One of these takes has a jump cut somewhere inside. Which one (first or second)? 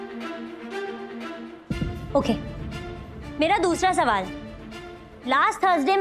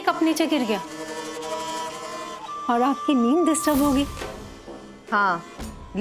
second